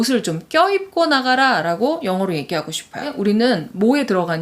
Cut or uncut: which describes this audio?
cut